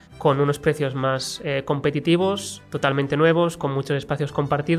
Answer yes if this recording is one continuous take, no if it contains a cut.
yes